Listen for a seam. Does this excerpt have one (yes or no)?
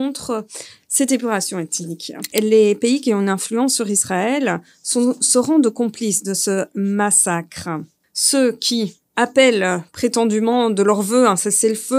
yes